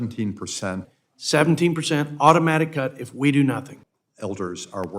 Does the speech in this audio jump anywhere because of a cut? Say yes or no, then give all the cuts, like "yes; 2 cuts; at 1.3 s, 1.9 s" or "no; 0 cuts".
yes; 2 cuts; at 0.9 s, 3.8 s